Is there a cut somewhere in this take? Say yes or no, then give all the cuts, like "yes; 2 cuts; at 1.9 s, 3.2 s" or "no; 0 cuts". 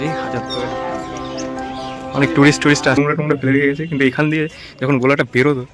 yes; 1 cut; at 3.0 s